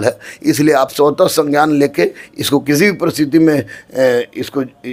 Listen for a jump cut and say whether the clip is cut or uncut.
uncut